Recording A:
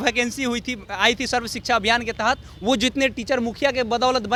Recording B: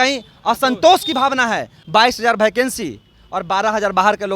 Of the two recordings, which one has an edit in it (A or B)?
B